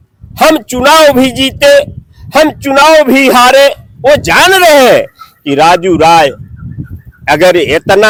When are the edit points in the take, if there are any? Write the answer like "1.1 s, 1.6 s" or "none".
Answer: none